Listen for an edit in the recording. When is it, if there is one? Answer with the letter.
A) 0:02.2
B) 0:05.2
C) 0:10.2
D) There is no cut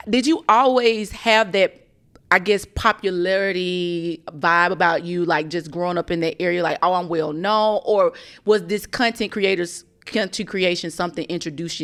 D